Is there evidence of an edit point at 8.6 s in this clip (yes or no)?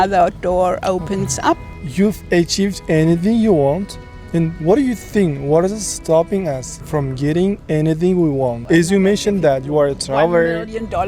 yes